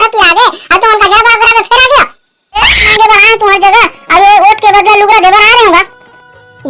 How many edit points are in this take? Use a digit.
1